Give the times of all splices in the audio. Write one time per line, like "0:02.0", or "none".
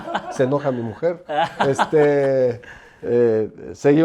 none